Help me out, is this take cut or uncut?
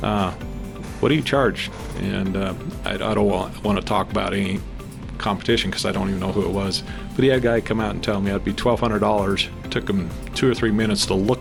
uncut